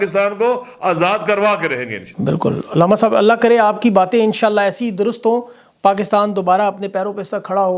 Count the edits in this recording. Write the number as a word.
zero